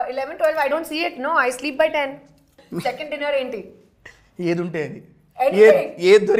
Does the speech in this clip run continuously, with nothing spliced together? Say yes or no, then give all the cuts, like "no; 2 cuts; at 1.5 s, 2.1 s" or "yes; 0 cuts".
no; 1 cut; at 2.6 s